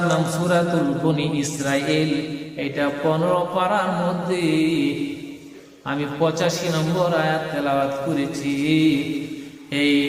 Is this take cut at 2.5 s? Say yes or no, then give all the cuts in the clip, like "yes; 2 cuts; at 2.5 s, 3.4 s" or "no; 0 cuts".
no; 0 cuts